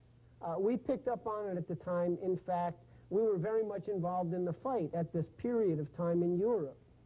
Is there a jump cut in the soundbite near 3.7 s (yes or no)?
no